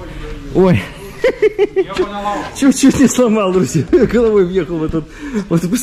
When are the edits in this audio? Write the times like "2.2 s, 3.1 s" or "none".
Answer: none